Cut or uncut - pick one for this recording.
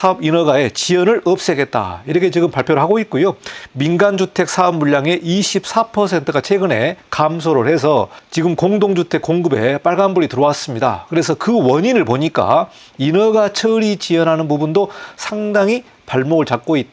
uncut